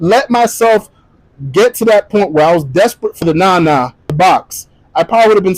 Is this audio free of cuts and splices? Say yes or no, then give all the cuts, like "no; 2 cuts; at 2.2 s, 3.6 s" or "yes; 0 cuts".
no; 2 cuts; at 3.2 s, 4.1 s